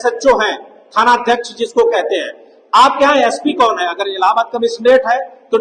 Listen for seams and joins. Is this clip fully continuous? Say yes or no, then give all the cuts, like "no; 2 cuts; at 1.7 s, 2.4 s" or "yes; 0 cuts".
yes; 0 cuts